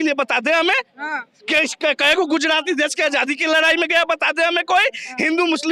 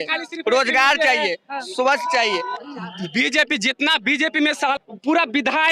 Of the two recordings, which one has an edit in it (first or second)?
second